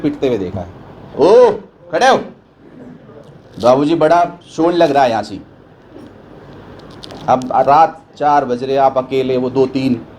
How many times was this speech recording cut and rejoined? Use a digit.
1